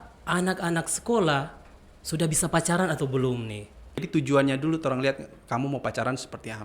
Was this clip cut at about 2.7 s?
no; 1 cut; at 4.0 s

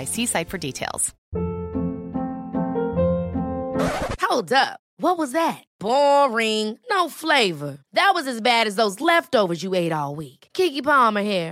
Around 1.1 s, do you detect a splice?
yes; 1 cut; at 1.1 s

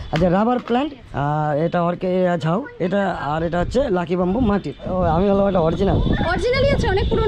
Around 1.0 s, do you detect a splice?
yes; 2 cuts; at 1.0 s, 4.9 s

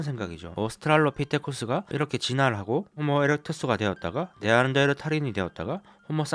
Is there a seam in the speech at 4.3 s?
no; 1 cut; at 1.9 s

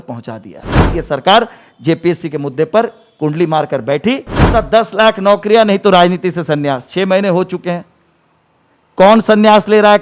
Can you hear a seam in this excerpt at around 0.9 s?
yes; 2 cuts; at 0.9 s, 4.5 s

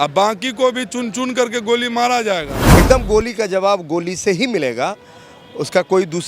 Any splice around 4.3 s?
no; 1 cut; at 2.7 s

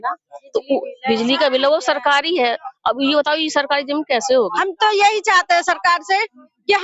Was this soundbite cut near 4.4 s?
yes; 1 cut; at 4.4 s

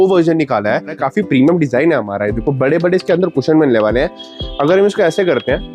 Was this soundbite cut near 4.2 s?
yes; 2 cuts; at 0.9 s, 4.2 s

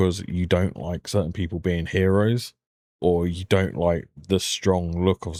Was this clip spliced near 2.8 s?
no; 0 cuts

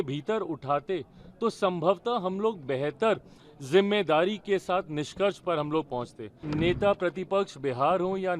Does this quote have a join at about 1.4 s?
no; 1 cut; at 6.4 s

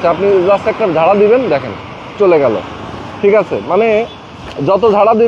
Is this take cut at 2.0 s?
no; 0 cuts

